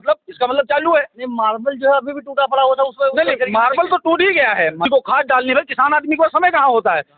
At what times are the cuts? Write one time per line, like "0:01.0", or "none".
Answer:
0:04.8